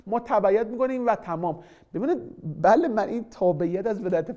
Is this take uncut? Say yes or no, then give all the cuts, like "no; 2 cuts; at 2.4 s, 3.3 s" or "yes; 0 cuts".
yes; 0 cuts